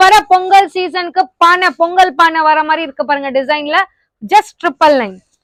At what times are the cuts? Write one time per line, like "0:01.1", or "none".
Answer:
none